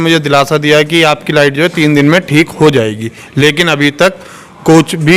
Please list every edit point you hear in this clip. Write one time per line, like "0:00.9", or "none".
none